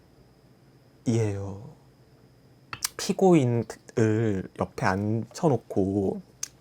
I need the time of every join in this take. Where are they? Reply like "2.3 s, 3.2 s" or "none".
2.6 s